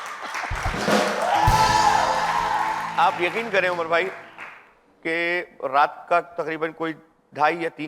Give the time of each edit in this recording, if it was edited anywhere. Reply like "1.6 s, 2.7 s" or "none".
none